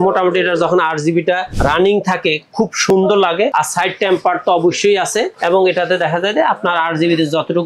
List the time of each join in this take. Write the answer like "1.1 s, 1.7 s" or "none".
1.5 s, 3.5 s, 5.3 s